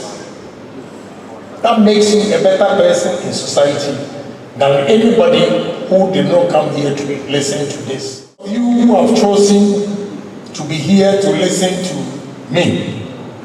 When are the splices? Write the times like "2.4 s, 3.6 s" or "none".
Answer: 8.6 s

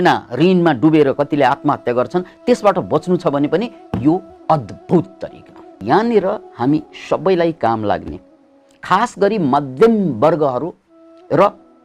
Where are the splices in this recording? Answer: 5.8 s

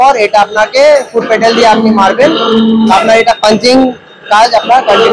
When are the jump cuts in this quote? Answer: none

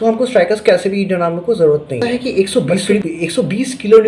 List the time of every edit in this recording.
2.0 s

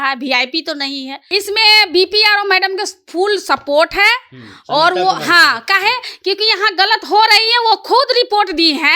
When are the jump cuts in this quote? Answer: 1.2 s

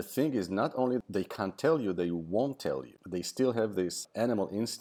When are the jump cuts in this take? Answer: 1.0 s, 2.9 s, 4.0 s

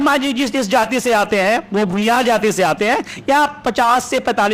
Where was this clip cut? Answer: none

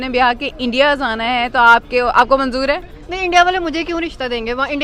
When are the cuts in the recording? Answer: none

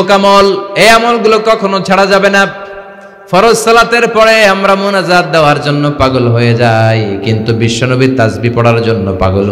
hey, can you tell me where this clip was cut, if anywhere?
none

